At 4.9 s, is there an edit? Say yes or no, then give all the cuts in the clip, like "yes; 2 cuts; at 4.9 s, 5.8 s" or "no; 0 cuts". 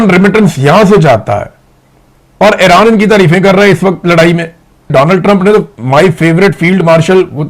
yes; 1 cut; at 4.9 s